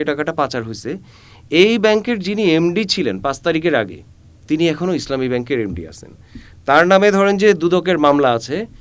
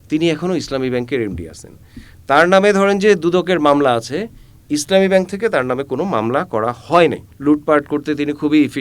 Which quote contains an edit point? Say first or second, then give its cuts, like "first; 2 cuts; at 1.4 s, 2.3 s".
second; 1 cut; at 7.3 s